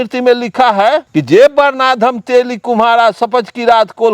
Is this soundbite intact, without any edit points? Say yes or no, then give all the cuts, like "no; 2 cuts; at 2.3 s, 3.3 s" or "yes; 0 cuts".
no; 1 cut; at 1.1 s